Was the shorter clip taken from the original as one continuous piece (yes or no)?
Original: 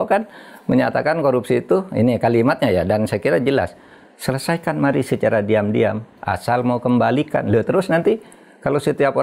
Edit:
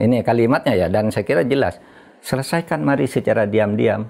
yes